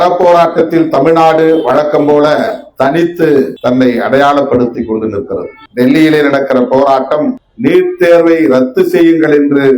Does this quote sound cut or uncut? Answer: cut